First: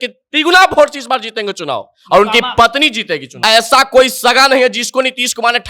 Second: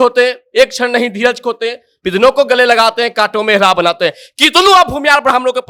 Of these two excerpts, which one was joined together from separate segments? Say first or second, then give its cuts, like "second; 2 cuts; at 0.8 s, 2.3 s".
first; 1 cut; at 3.3 s